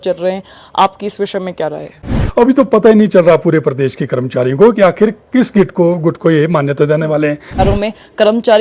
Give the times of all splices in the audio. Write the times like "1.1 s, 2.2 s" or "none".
2.2 s, 7.6 s